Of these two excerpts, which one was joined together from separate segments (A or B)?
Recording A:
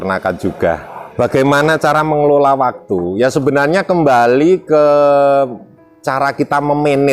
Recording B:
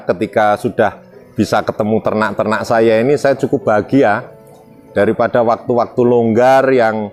A